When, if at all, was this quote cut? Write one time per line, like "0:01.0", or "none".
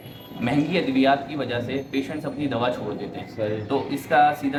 none